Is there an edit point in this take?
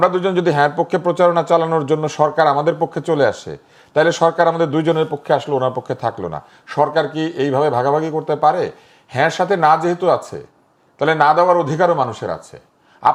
no; 0 cuts

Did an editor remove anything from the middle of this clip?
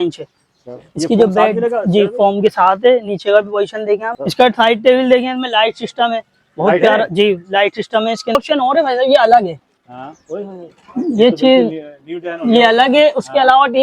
yes; 2 cuts; at 4.1 s, 8.4 s

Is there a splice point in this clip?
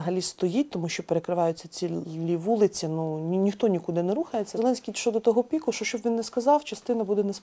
yes; 1 cut; at 4.6 s

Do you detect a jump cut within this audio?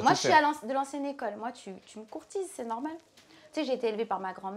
no; 0 cuts

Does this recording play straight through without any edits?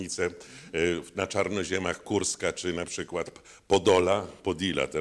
yes; 0 cuts

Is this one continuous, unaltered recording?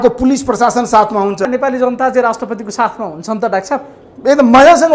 no; 1 cut; at 1.4 s

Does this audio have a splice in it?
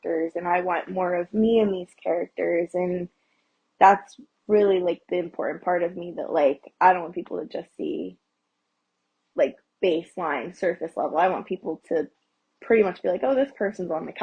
no; 0 cuts

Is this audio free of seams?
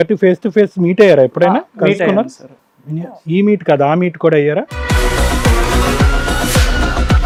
yes; 0 cuts

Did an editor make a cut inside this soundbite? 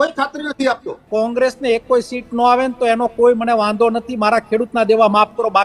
yes; 1 cut; at 0.9 s

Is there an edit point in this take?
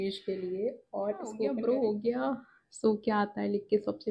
yes; 1 cut; at 1.4 s

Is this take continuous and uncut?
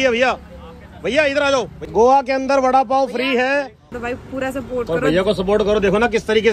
no; 2 cuts; at 1.8 s, 3.9 s

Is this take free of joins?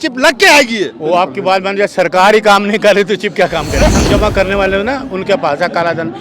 no; 1 cut; at 3.9 s

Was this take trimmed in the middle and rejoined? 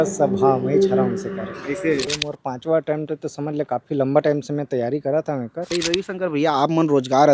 yes; 2 cuts; at 2.1 s, 5.6 s

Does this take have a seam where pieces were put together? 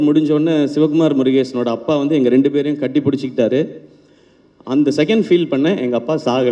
no; 0 cuts

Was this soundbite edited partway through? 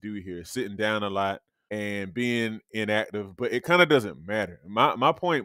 yes; 1 cut; at 1.5 s

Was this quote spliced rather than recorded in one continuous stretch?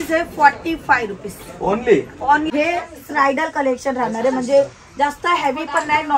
yes; 1 cut; at 2.5 s

